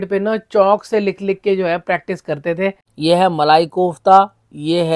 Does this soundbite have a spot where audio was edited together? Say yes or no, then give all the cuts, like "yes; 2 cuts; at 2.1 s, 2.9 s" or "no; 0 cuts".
yes; 1 cut; at 2.9 s